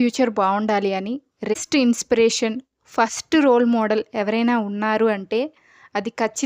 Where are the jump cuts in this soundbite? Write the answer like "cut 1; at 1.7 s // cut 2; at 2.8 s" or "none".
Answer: cut 1; at 1.5 s